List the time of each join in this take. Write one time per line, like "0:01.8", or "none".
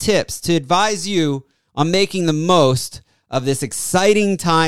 none